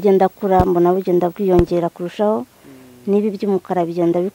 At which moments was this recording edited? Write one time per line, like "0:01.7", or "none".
none